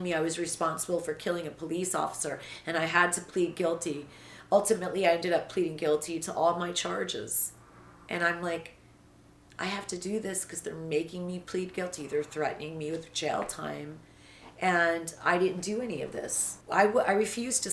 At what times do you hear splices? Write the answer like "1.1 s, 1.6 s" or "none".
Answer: 16.5 s